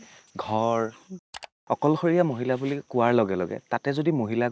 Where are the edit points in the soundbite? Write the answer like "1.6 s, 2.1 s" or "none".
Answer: 1.4 s